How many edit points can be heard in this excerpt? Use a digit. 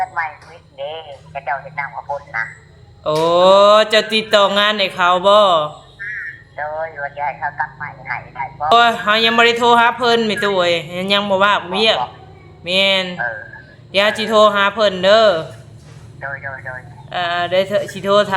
1